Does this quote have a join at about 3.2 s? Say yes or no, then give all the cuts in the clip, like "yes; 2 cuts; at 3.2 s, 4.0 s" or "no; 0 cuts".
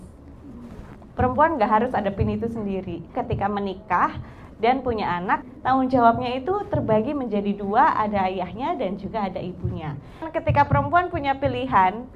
yes; 3 cuts; at 3.2 s, 5.4 s, 10.3 s